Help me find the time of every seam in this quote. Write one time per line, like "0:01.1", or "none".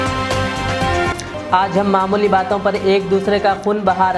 0:01.2